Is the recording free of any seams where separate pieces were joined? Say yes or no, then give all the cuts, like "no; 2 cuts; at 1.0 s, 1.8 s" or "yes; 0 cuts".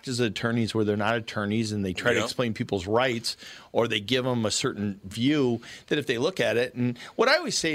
yes; 0 cuts